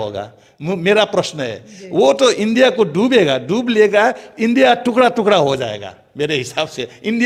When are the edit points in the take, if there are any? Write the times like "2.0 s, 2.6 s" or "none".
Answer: none